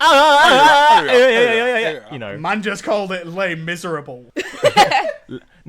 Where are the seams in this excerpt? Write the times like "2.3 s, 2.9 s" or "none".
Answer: 4.2 s